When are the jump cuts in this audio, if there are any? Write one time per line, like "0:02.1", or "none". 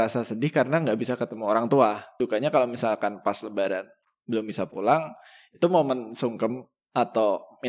0:02.1